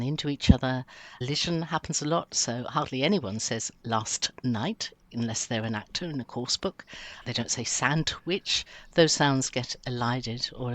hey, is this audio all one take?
no; 2 cuts; at 1.2 s, 7.2 s

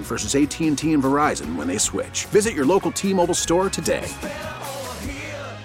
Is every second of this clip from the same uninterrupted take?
yes; 0 cuts

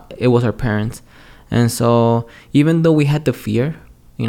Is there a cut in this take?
no; 0 cuts

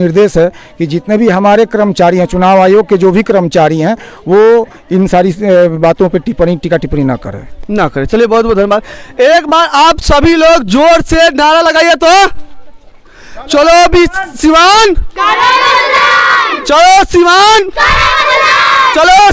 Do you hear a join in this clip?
no; 0 cuts

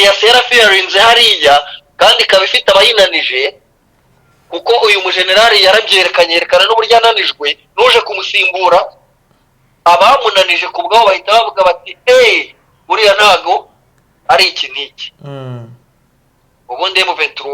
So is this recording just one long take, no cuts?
yes; 0 cuts

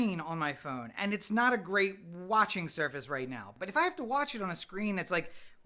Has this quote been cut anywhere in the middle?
yes; 1 cut; at 3.5 s

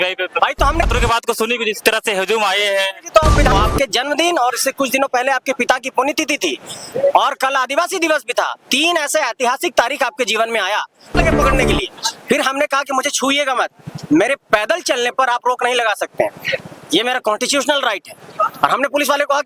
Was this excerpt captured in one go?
no; 3 cuts; at 0.9 s, 3.5 s, 11.2 s

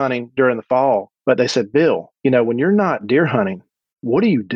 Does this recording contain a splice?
yes; 2 cuts; at 1.1 s, 2.1 s

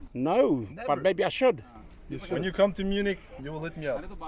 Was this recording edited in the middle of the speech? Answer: no; 0 cuts

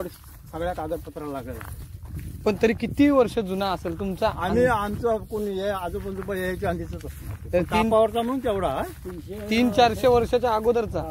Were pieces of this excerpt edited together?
no; 0 cuts

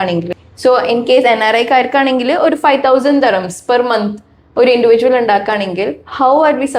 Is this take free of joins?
yes; 0 cuts

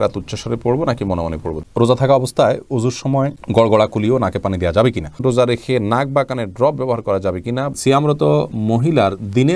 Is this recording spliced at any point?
yes; 3 cuts; at 1.5 s, 5.2 s, 7.7 s

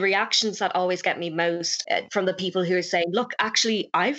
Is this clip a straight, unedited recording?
no; 1 cut; at 1.7 s

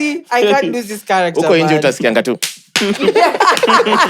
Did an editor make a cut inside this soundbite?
no; 0 cuts

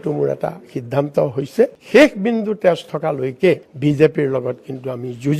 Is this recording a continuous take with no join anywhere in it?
no; 1 cut; at 1.8 s

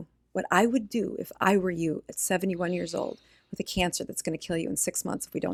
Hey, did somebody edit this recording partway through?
no; 0 cuts

